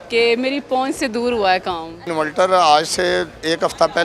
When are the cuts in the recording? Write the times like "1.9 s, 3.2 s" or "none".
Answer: 2.1 s